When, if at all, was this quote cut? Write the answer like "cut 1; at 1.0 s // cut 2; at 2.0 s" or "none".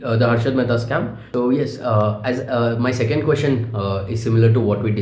cut 1; at 1.2 s